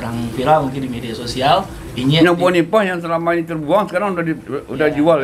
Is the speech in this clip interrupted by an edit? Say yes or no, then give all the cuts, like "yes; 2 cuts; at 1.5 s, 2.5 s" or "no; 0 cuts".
no; 0 cuts